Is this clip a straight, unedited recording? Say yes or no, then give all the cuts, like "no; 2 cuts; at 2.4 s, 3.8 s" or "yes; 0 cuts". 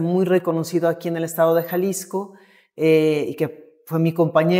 yes; 0 cuts